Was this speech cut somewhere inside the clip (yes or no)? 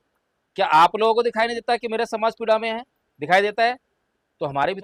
no